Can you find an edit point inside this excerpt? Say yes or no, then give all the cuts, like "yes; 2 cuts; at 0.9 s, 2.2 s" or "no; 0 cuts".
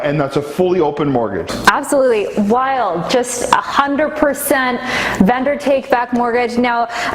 yes; 1 cut; at 1.5 s